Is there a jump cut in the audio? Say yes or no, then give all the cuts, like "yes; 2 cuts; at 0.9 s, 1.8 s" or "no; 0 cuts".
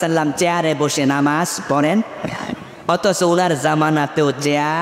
no; 0 cuts